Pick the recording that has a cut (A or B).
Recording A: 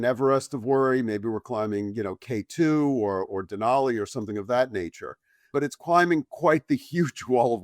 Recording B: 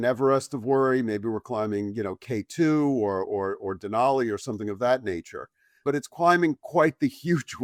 A